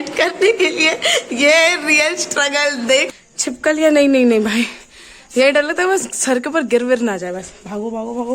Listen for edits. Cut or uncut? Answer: cut